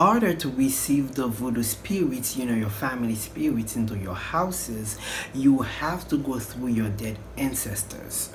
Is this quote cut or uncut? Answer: uncut